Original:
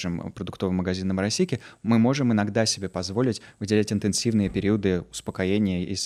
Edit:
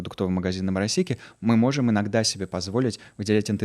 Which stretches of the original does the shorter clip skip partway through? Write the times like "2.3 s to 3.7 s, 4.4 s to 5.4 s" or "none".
none